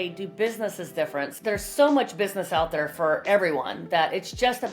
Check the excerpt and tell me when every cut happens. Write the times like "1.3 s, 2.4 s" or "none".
1.3 s

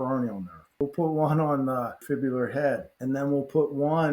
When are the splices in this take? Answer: 0.8 s, 2.0 s, 2.9 s

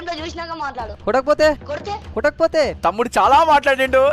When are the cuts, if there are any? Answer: 0.9 s, 2.7 s

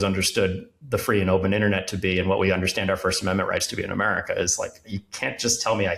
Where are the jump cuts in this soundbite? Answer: none

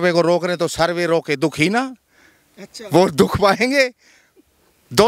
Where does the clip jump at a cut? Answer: none

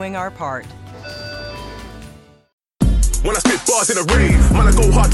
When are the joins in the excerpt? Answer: 2.5 s

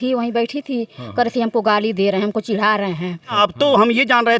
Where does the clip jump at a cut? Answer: 3.3 s

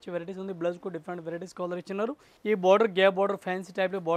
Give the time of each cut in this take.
2.3 s

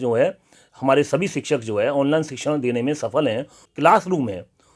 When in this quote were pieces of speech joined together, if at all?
3.6 s

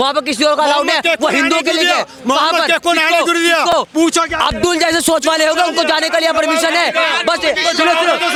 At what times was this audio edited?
none

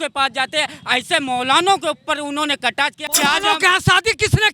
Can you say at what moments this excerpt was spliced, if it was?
3.0 s

